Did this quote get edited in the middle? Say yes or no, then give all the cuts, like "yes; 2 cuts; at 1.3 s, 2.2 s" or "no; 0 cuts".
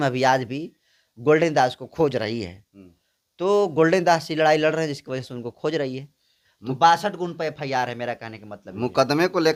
no; 0 cuts